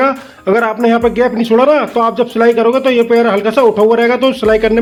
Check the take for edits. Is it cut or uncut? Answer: uncut